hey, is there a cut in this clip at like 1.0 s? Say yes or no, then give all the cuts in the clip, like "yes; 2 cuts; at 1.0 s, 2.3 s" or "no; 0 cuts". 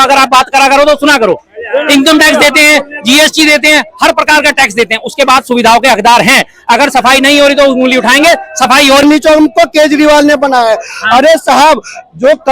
no; 1 cut; at 9.0 s